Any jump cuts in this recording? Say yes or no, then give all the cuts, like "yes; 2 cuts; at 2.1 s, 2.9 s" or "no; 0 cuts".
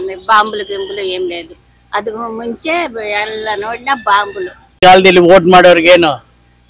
yes; 1 cut; at 4.8 s